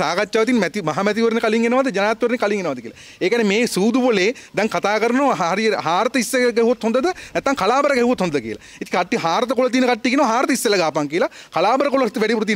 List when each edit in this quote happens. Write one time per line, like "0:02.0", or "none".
none